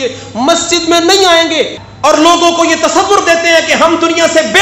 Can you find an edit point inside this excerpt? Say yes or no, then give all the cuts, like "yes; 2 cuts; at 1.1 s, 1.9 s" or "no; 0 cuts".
yes; 1 cut; at 1.8 s